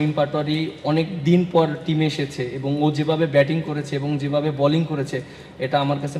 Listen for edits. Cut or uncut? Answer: uncut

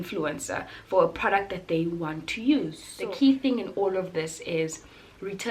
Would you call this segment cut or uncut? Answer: cut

